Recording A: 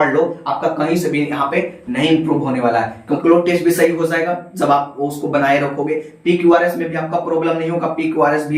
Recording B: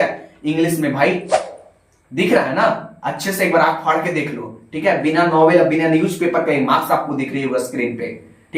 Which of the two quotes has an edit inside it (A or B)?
A